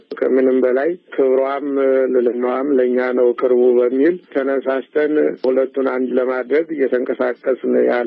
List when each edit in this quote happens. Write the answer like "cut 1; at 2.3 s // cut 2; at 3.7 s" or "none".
cut 1; at 5.4 s